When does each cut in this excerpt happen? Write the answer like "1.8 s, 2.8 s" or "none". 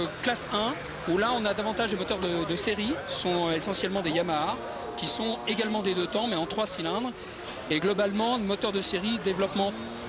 none